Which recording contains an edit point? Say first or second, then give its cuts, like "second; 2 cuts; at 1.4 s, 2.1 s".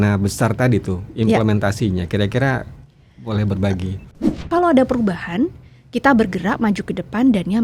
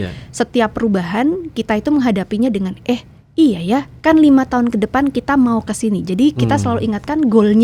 first; 1 cut; at 4.1 s